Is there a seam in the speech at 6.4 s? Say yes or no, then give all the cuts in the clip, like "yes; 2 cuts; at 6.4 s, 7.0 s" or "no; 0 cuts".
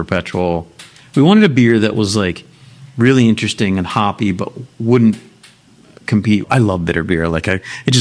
yes; 1 cut; at 6.4 s